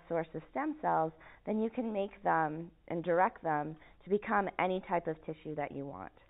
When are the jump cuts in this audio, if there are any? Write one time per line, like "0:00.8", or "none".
none